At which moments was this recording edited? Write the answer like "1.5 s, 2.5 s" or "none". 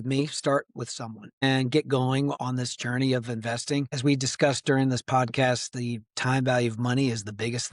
1.4 s, 2.4 s, 3.9 s